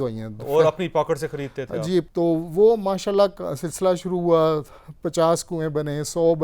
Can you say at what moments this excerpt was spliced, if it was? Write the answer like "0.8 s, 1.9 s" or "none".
2.1 s